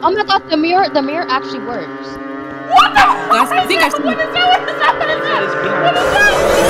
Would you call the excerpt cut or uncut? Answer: uncut